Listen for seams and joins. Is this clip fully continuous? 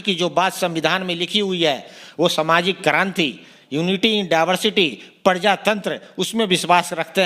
yes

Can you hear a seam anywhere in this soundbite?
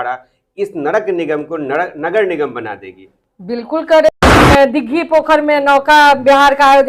yes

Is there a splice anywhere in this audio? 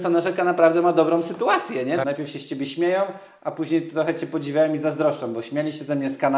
yes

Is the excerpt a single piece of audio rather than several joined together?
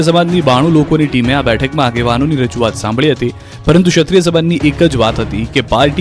yes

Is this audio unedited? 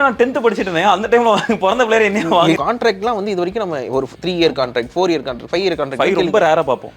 no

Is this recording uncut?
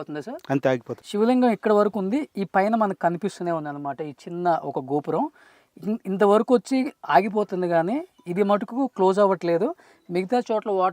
no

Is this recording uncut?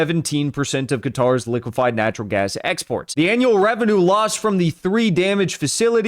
no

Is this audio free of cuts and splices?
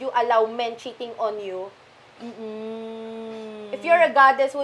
yes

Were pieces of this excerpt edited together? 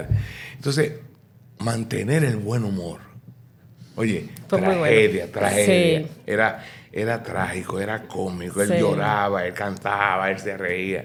no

